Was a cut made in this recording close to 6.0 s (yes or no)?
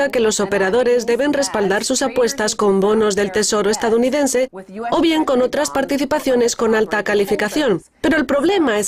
yes